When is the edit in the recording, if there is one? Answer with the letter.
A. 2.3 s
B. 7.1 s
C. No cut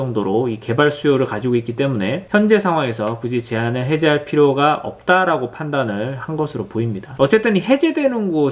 B